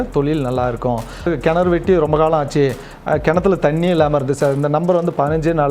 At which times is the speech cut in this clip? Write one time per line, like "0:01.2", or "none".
0:01.3